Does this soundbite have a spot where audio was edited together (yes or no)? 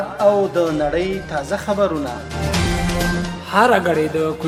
no